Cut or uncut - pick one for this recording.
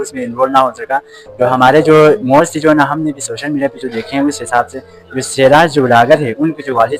uncut